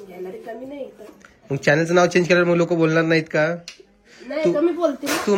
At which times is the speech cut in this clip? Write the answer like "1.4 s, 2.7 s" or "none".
none